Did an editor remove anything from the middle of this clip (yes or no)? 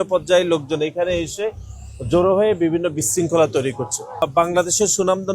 yes